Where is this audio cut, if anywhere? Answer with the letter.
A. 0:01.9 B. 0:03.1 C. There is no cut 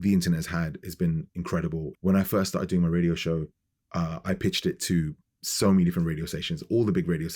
A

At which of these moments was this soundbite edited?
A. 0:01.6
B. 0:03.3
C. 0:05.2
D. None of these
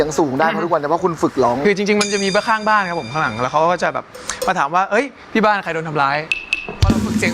A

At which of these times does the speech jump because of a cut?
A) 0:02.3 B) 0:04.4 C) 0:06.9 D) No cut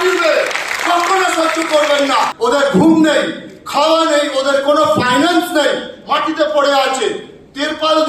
A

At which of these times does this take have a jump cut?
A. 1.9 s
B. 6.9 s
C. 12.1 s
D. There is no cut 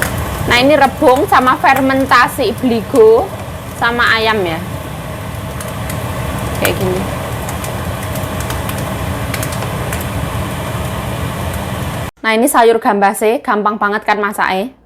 C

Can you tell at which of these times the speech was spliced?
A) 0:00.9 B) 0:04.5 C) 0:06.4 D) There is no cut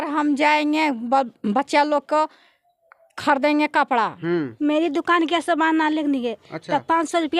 B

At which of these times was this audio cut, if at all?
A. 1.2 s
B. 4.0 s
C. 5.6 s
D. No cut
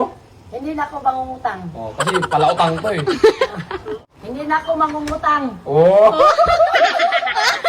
B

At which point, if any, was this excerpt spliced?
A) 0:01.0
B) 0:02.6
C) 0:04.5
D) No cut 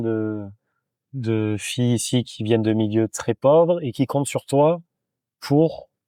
D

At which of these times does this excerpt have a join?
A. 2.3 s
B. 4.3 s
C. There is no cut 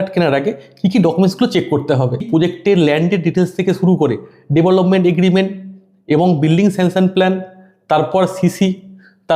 A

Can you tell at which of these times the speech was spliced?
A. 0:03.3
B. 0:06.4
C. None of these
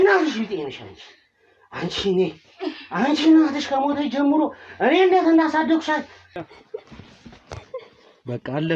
B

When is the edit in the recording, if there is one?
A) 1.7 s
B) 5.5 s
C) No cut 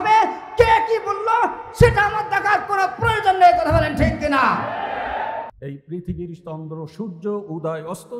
B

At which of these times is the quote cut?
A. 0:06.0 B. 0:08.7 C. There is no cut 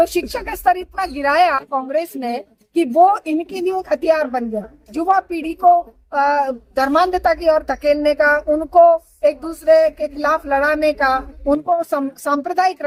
C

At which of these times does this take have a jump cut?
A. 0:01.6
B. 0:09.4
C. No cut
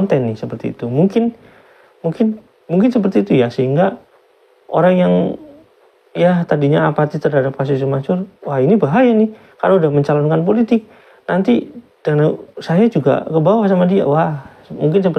C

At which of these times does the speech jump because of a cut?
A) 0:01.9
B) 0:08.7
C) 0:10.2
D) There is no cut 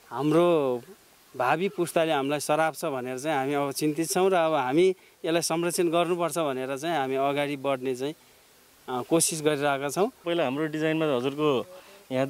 C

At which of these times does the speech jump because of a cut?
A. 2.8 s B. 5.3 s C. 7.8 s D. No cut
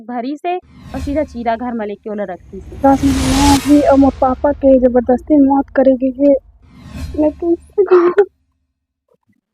A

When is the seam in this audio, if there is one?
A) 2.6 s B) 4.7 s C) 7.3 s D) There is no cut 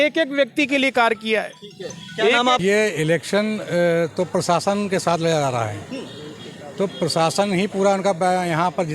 A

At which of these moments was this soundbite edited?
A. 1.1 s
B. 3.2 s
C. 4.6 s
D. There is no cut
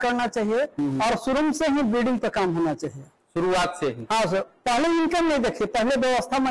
D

